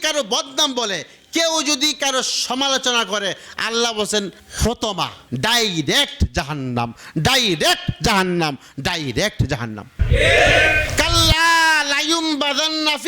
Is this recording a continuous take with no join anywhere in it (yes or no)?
no